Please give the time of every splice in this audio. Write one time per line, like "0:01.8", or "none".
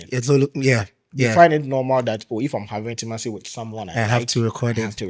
0:03.0

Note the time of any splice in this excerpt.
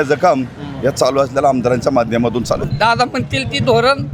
0:02.6

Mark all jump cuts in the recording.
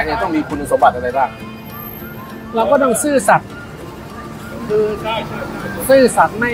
none

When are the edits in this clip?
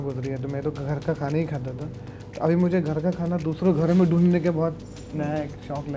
none

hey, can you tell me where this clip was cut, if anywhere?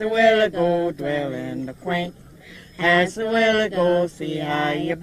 none

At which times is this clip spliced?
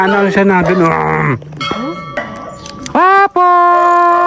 0:02.2

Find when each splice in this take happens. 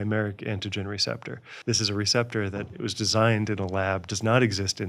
0:01.5

